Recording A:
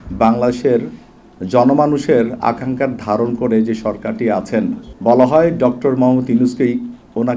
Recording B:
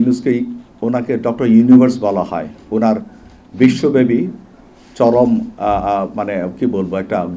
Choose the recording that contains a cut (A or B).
A